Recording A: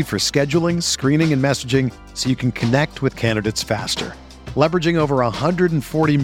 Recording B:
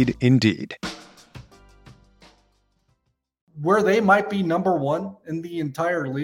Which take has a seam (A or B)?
B